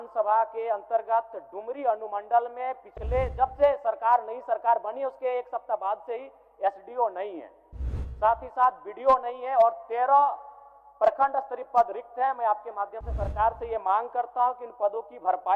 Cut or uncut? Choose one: uncut